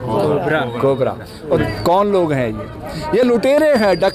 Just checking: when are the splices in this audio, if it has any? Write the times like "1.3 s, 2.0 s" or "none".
1.6 s